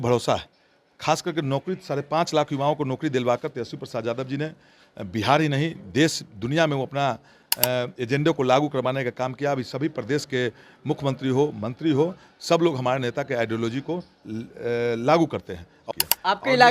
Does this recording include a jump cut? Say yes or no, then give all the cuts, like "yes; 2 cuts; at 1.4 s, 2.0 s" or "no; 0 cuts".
yes; 1 cut; at 15.7 s